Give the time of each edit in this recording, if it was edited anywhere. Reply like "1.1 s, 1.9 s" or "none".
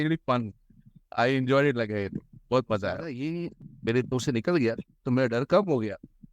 3.2 s